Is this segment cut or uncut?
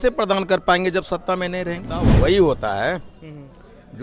cut